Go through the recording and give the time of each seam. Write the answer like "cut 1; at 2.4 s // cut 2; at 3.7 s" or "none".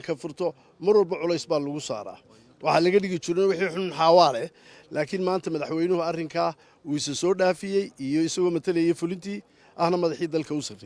cut 1; at 9.9 s